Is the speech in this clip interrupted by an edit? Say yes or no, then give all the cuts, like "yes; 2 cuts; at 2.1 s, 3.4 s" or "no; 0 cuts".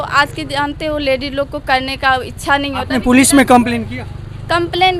no; 0 cuts